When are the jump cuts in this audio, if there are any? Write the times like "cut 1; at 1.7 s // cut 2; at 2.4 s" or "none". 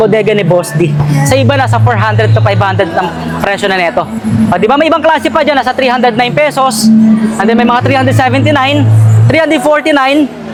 none